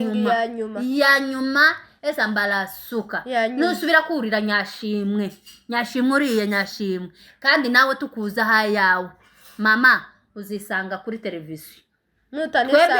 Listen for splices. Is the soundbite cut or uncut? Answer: uncut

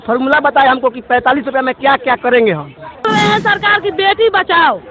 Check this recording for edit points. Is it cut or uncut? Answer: cut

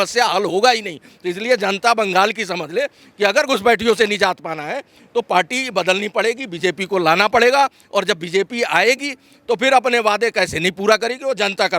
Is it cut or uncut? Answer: uncut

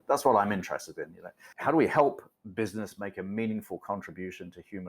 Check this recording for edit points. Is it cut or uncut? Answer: cut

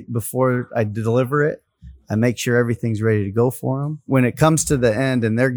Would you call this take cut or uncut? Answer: cut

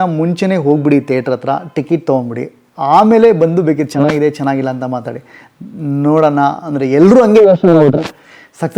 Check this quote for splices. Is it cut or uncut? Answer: uncut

